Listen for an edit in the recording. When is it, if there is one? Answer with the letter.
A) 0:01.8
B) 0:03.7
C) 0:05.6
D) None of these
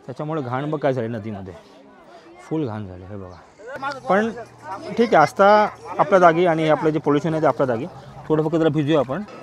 B